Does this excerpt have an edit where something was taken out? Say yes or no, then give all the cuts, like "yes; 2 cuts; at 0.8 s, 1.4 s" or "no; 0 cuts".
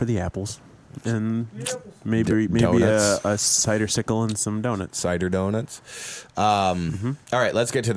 no; 0 cuts